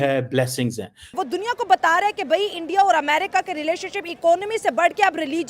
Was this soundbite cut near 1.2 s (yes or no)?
yes